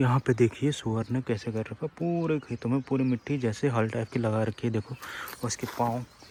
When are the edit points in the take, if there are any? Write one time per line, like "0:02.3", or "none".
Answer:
none